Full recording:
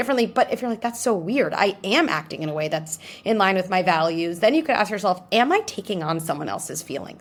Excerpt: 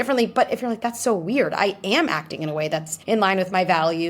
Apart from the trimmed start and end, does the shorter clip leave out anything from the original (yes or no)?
yes